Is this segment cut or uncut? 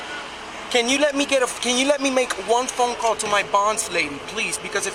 uncut